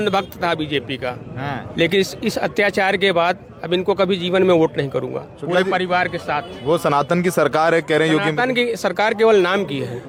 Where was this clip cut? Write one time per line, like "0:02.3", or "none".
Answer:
none